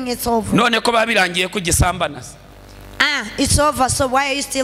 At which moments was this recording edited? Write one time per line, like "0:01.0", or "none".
none